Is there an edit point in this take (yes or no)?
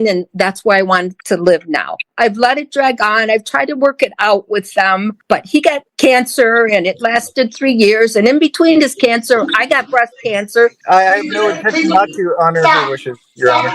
yes